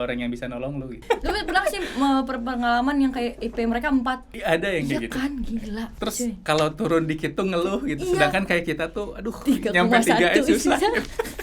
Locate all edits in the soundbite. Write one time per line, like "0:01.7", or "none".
0:01.0
0:04.3
0:05.9

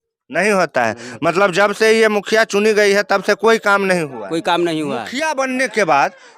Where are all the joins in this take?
0:05.1

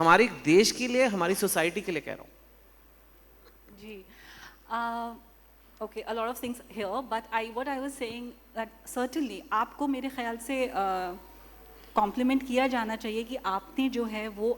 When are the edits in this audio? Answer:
none

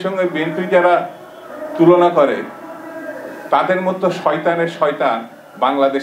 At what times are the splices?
none

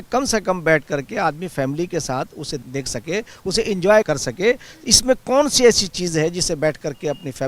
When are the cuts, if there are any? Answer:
0:02.6
0:04.1

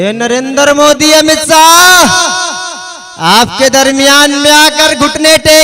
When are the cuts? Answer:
none

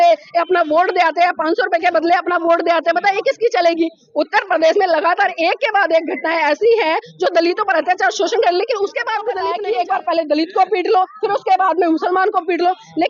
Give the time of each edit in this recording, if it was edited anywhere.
0:09.4

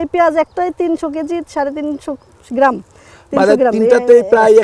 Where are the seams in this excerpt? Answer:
none

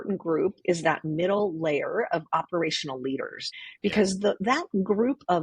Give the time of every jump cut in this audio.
0:03.4

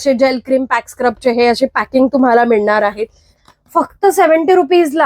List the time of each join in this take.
0:03.4

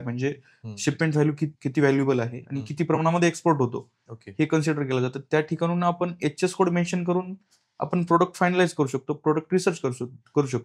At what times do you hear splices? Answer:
0:01.6

